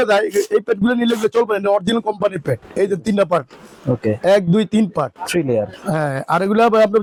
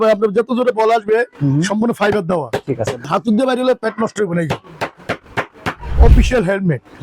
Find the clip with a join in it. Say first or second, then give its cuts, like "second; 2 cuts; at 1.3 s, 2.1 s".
second; 2 cuts; at 3.1 s, 6.0 s